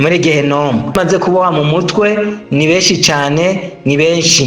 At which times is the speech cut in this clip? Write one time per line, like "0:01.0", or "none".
0:00.9